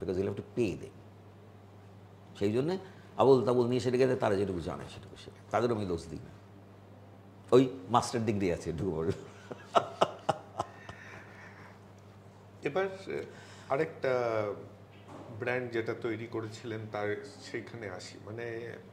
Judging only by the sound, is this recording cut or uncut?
uncut